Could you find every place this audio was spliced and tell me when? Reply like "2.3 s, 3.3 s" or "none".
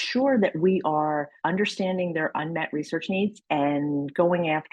1.3 s